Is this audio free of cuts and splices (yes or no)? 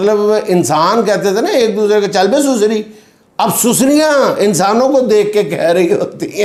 yes